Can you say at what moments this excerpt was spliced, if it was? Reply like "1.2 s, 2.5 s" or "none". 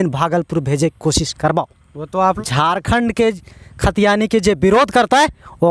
2.4 s